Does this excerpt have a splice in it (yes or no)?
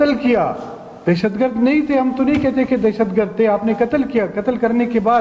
no